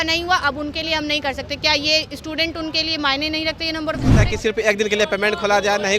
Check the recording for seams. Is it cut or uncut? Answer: cut